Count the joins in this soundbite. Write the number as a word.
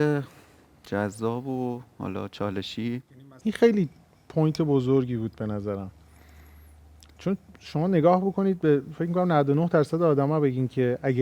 one